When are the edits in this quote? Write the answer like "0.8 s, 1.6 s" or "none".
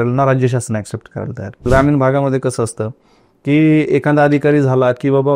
1.7 s